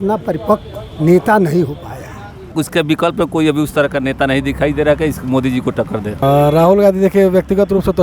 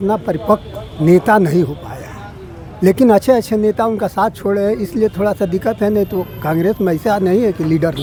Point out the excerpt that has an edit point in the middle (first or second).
first